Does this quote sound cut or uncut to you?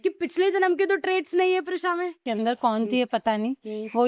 cut